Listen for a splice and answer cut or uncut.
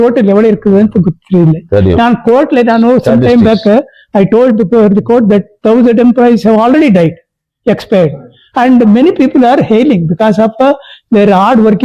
uncut